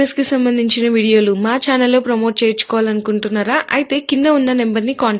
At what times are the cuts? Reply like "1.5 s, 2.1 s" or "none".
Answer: none